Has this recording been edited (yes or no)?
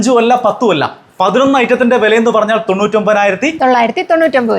yes